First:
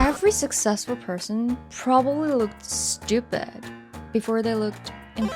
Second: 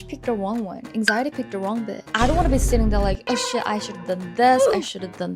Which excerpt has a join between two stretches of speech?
second; 1 cut; at 2.0 s

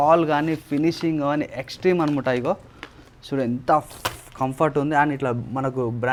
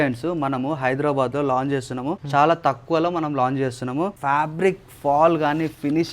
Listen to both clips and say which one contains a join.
second; 2 cuts; at 2.2 s, 4.2 s

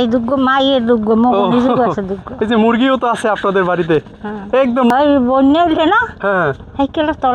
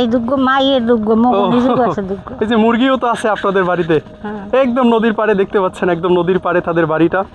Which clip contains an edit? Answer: first; 1 cut; at 4.9 s

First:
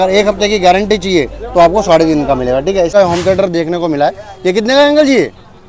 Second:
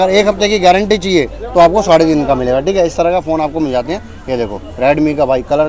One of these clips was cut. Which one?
first; 1 cut; at 2.9 s

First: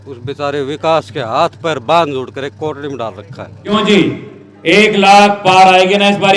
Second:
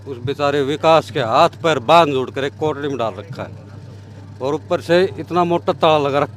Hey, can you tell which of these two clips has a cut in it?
first; 1 cut; at 3.7 s

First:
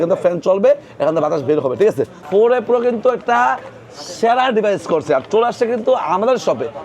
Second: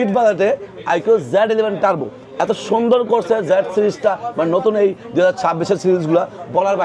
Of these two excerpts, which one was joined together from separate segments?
first; 1 cut; at 2.1 s

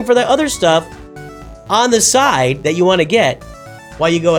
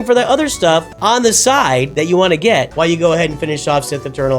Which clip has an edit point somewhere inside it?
second; 2 cuts; at 0.9 s, 2.7 s

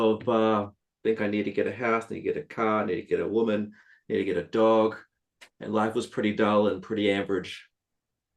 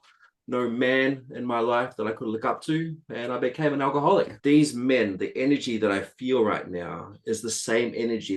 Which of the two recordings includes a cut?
second; 1 cut; at 4.3 s

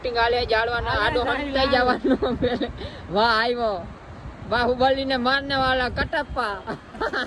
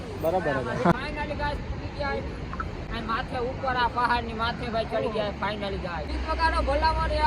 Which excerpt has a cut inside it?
second; 2 cuts; at 0.9 s, 6.1 s

